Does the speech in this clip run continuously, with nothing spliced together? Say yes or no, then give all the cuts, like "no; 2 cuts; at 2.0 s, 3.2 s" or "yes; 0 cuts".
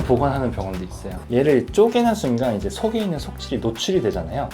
no; 1 cut; at 1.2 s